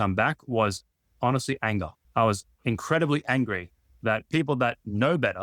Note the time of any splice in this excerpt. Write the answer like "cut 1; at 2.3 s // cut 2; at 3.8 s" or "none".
cut 1; at 2.0 s